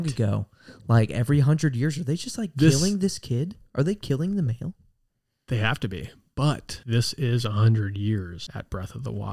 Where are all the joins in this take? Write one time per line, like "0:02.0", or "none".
0:06.7
0:08.4